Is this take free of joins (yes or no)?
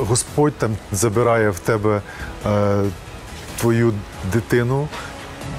yes